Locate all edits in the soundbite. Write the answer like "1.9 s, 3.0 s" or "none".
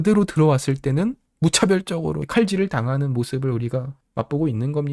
1.3 s, 2.2 s, 4.0 s